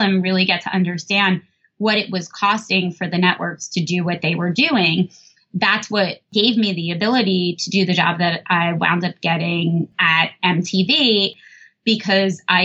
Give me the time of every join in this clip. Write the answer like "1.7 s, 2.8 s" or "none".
11.3 s